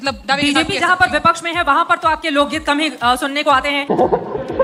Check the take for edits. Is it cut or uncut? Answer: uncut